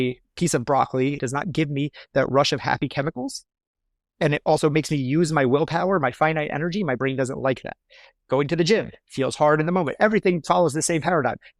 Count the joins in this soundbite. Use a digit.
1